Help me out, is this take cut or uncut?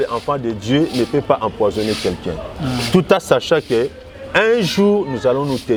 uncut